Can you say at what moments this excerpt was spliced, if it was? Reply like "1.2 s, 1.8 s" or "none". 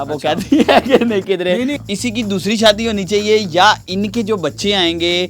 1.8 s

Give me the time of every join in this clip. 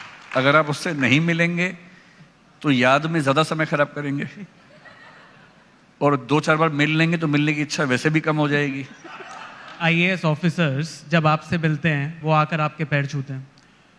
9.7 s, 12.1 s

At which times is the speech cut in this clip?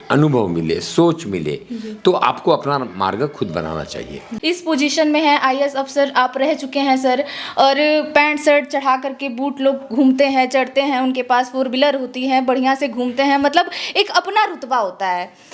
4.3 s

